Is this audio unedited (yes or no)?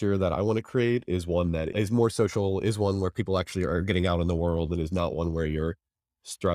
yes